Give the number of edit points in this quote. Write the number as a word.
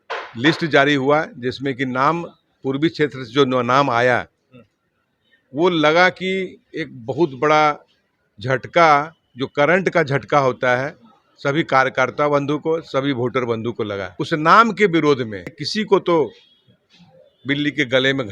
two